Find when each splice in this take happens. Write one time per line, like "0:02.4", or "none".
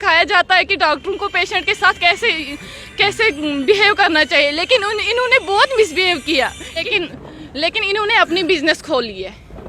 0:06.8